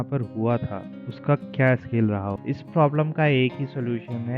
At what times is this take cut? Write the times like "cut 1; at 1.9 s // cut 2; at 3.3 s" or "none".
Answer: cut 1; at 2.4 s